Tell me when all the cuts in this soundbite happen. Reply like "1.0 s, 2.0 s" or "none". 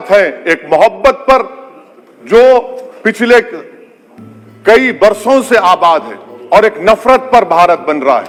none